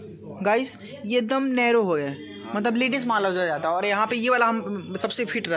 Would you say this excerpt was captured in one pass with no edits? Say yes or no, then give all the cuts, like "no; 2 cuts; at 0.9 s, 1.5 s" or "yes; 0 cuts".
yes; 0 cuts